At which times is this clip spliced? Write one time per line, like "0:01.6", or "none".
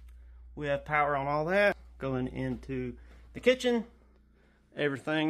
0:01.9

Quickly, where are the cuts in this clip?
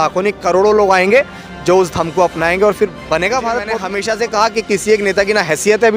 0:03.9

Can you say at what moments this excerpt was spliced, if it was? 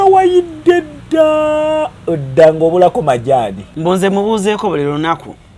0:03.7

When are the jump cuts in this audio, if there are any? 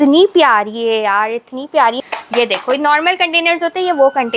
0:02.0

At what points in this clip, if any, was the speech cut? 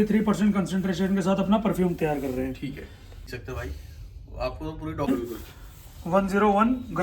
0:03.3
0:05.1

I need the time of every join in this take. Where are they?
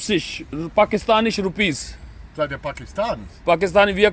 0:01.0

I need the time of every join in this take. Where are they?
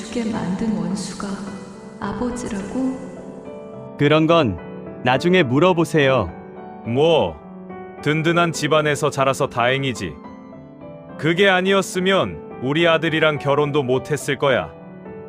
none

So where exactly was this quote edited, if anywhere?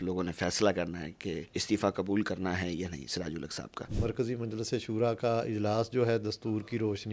0:01.5
0:03.8

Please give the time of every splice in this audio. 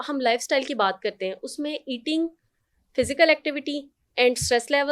none

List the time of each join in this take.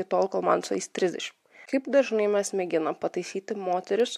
0:01.6

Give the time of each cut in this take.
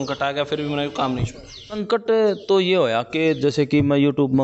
0:02.0

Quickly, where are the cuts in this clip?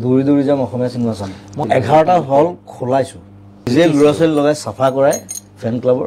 0:01.6
0:03.7

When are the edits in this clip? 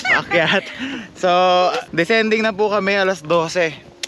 0:01.8

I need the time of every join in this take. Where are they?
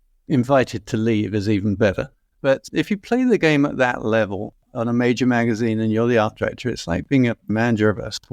0:02.6

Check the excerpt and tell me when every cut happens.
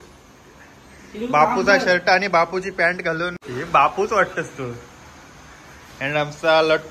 0:03.4

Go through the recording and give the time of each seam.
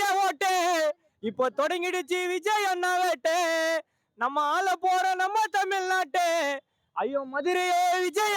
none

